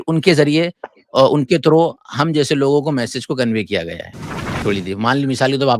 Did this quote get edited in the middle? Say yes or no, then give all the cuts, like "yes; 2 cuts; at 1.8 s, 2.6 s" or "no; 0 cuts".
yes; 1 cut; at 4.6 s